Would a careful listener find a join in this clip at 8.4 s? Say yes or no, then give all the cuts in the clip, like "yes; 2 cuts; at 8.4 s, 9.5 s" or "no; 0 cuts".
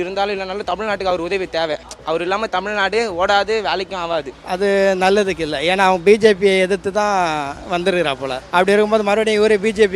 yes; 3 cuts; at 1.9 s, 4.4 s, 8.4 s